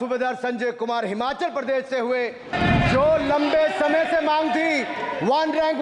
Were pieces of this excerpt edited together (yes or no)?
yes